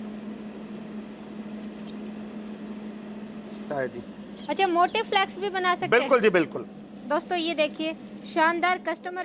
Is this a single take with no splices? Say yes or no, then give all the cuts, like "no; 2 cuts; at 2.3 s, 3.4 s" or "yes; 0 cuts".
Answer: no; 1 cut; at 3.7 s